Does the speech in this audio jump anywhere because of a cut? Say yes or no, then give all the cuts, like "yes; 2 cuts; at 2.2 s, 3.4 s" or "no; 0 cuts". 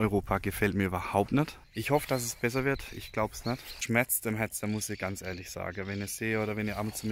yes; 2 cuts; at 1.7 s, 3.8 s